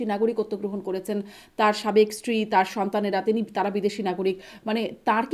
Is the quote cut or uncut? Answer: uncut